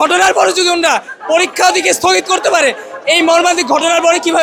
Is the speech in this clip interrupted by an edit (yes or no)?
no